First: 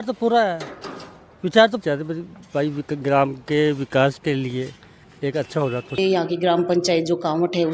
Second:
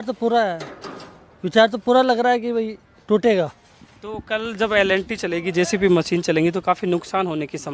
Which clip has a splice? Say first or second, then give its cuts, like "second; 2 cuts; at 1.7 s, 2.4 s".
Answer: first; 2 cuts; at 1.8 s, 6.0 s